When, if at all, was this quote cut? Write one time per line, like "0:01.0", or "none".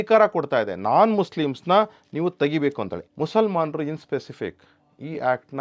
0:02.9